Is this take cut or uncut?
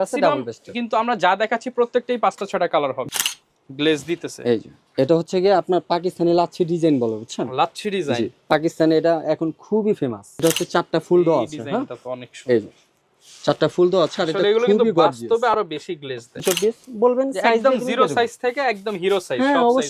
cut